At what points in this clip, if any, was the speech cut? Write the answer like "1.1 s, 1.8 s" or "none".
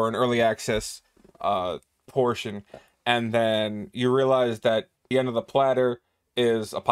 5.1 s